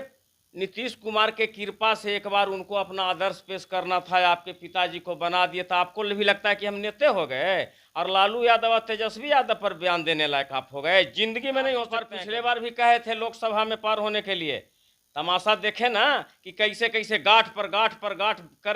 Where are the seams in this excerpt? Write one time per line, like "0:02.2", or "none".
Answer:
0:12.2